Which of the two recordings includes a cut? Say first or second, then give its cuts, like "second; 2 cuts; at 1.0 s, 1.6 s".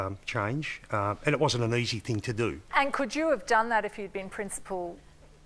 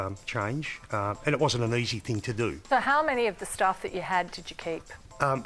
second; 1 cut; at 2.6 s